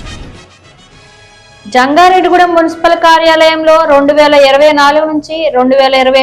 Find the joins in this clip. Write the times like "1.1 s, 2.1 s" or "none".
1.4 s